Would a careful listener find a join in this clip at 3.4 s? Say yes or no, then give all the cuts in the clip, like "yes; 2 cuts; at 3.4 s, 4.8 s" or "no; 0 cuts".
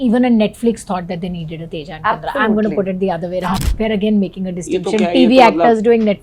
yes; 1 cut; at 3.4 s